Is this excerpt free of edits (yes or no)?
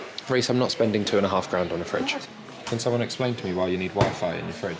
no